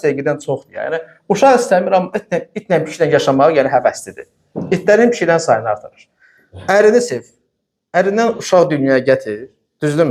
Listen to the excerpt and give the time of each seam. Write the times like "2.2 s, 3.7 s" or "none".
none